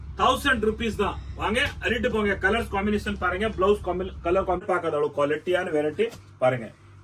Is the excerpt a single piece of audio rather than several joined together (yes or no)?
no